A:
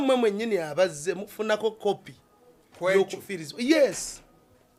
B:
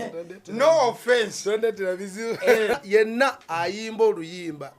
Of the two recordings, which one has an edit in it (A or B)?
B